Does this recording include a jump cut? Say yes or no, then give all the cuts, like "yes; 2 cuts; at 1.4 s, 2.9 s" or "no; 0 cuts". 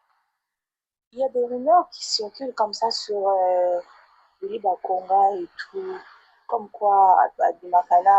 no; 0 cuts